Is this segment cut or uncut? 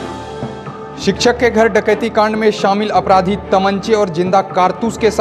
cut